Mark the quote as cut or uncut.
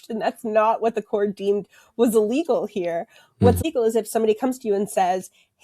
cut